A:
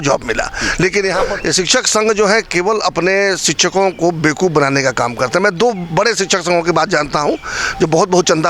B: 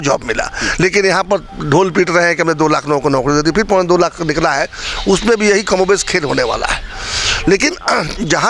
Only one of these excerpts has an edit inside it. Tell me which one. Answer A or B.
A